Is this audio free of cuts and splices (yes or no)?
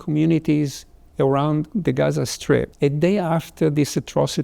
no